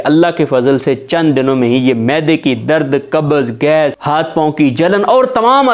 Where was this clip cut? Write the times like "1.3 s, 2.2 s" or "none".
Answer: 4.0 s